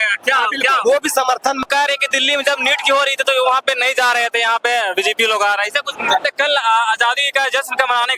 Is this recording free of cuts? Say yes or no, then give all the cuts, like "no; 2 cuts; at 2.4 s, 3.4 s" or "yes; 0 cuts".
no; 2 cuts; at 1.6 s, 6.2 s